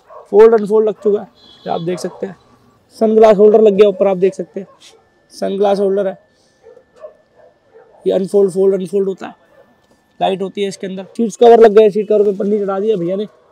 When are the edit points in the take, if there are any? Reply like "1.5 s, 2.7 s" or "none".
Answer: 2.8 s, 11.2 s

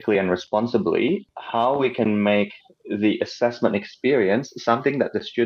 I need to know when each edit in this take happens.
1.3 s

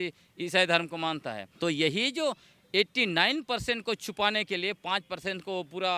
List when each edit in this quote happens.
1.4 s

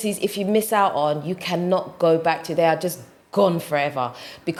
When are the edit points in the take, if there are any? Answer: none

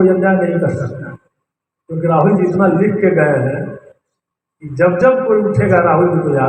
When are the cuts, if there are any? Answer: none

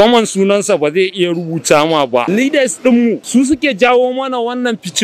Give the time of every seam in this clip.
2.3 s, 3.2 s

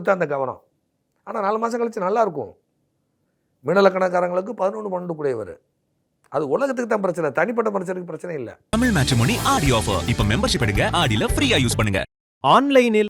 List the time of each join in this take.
8.5 s

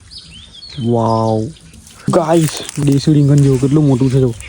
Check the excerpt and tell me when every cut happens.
2.1 s, 2.8 s

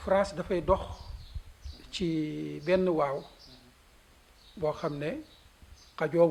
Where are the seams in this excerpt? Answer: none

